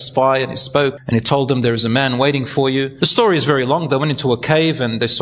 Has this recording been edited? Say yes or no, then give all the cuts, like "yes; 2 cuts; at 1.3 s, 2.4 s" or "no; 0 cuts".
yes; 2 cuts; at 1.0 s, 2.9 s